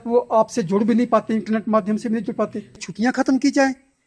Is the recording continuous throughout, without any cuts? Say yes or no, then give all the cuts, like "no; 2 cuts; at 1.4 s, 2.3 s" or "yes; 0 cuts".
no; 1 cut; at 2.9 s